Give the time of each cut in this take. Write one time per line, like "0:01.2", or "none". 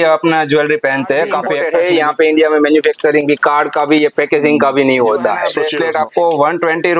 0:01.6
0:05.6